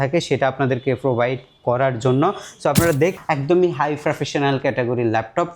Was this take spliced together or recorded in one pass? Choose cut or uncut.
cut